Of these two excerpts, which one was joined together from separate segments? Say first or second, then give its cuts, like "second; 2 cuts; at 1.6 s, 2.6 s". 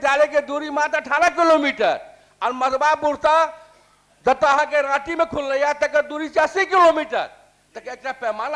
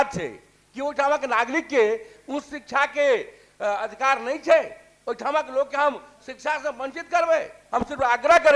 second; 1 cut; at 7.6 s